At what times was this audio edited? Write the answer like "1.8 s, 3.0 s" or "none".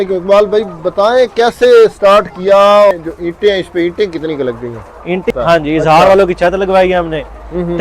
2.9 s, 5.3 s